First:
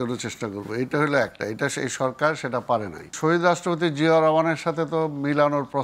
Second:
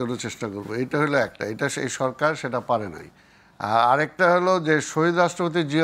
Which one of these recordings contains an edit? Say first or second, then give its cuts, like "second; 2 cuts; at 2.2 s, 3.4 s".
first; 1 cut; at 3.1 s